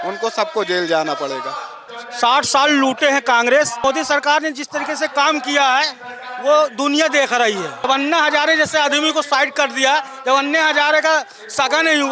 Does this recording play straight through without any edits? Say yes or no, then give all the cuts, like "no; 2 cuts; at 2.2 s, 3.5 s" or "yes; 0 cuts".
no; 3 cuts; at 2.0 s, 3.8 s, 7.9 s